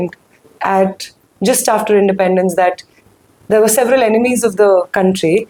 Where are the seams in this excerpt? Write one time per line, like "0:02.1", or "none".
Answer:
none